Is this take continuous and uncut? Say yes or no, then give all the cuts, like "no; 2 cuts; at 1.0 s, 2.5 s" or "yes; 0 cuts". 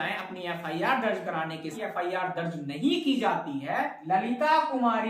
no; 2 cuts; at 1.8 s, 4.0 s